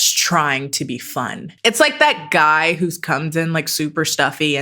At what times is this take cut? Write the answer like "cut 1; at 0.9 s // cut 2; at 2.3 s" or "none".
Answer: cut 1; at 1.4 s